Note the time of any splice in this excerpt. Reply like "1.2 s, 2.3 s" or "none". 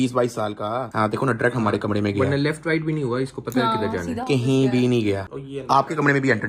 none